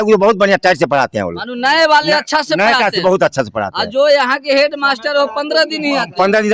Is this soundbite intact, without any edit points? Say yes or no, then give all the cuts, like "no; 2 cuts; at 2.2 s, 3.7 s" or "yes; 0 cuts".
yes; 0 cuts